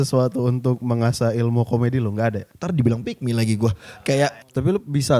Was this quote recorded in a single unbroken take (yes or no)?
no